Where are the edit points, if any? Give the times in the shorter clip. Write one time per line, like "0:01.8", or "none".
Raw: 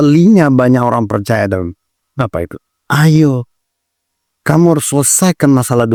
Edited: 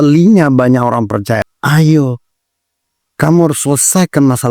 0:01.4